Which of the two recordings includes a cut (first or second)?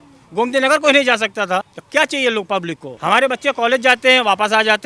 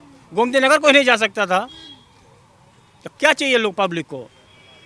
first